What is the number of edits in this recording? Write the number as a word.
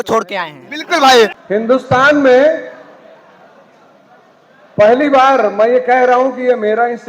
one